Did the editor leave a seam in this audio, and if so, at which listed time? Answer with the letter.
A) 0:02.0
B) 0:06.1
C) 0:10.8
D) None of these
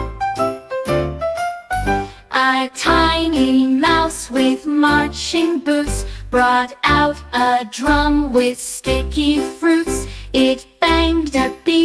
A